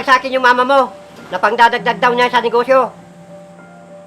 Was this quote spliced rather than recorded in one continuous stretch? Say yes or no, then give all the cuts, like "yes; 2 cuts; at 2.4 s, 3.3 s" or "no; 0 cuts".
no; 0 cuts